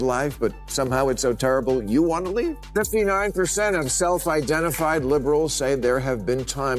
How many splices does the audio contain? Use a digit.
1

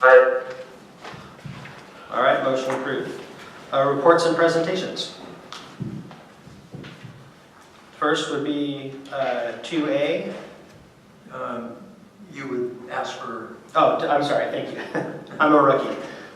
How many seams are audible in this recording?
1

